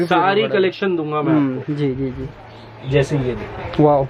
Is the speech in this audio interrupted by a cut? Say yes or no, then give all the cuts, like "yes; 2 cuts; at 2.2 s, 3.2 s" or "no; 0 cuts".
no; 0 cuts